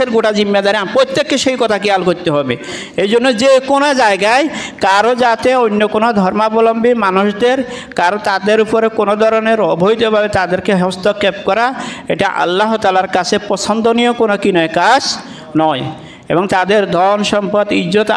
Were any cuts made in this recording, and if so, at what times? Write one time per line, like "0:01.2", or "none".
none